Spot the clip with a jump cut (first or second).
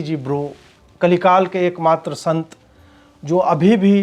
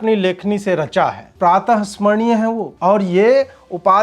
second